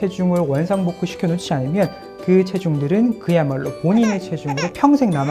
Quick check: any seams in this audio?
no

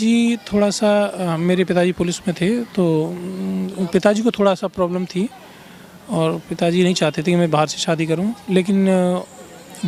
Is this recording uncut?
yes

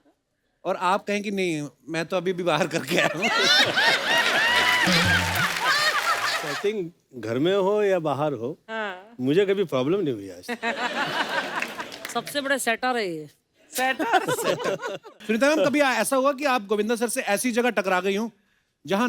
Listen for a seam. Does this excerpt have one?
yes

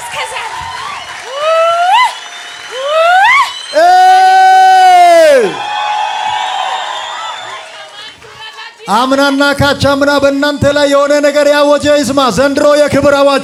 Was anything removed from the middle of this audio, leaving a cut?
no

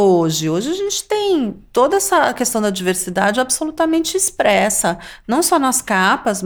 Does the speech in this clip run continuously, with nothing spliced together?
yes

